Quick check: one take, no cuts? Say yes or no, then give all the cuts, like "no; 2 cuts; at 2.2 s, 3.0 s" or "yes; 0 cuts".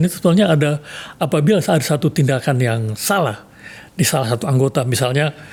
yes; 0 cuts